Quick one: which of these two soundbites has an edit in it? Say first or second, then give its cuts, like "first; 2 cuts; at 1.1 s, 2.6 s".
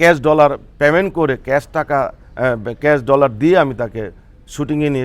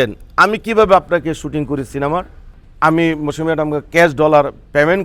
second; 1 cut; at 2.5 s